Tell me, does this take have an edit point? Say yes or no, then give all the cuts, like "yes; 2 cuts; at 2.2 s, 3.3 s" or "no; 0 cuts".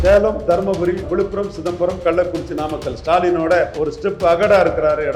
yes; 2 cuts; at 1.1 s, 3.7 s